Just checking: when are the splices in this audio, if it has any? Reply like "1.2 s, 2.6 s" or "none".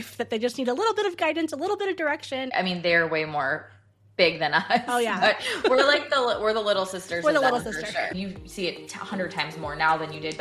2.5 s, 8.2 s